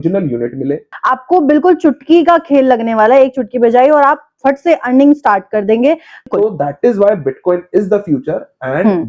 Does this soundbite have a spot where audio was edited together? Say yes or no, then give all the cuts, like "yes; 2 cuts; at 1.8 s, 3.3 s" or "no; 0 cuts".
yes; 2 cuts; at 0.9 s, 6.3 s